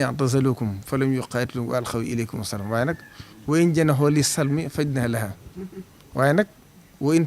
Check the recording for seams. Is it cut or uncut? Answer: uncut